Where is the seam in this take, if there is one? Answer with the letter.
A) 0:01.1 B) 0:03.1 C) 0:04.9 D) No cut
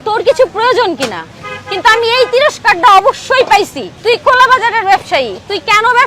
D